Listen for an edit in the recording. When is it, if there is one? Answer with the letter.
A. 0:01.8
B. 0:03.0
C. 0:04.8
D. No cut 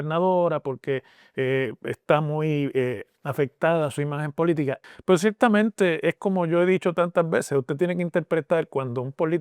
C